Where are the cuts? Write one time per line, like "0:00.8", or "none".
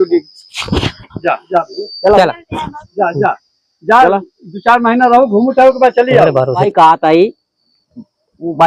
0:06.6

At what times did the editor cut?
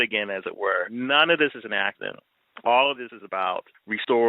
0:00.9

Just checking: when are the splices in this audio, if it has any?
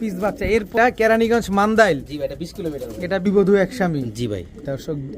0:00.7
0:03.3

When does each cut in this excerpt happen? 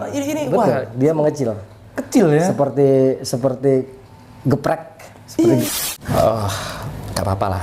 0:05.6

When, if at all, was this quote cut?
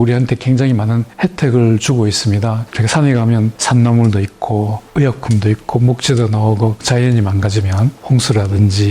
0:01.1
0:02.7
0:03.6
0:04.8
0:06.8
0:08.0

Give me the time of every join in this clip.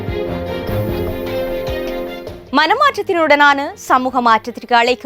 0:02.2

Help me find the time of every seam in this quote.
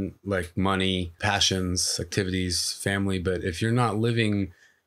0:01.2

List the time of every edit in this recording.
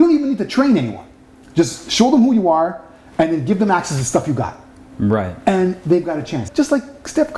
0:06.4

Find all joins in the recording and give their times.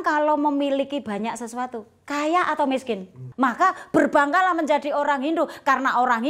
0:03.2

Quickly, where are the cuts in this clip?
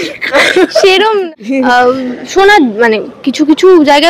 0:01.2

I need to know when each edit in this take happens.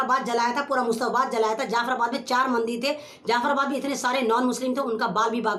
none

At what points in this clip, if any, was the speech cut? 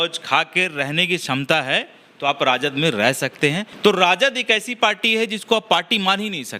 0:03.7

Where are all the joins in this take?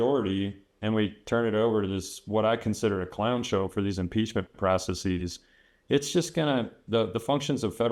none

